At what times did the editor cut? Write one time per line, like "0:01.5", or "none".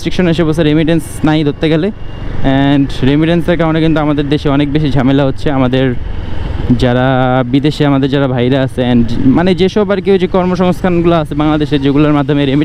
none